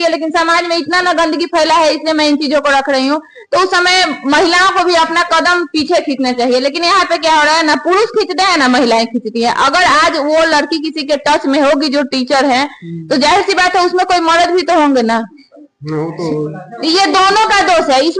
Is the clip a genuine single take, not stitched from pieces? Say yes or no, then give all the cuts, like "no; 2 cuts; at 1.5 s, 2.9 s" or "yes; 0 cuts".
yes; 0 cuts